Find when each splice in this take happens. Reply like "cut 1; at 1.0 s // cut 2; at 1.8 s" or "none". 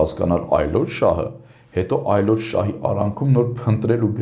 none